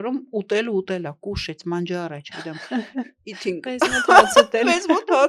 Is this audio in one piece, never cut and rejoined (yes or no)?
yes